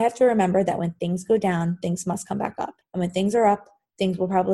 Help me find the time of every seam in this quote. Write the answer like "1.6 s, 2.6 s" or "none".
2.8 s